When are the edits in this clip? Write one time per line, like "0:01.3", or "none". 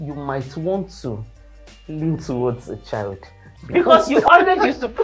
0:03.7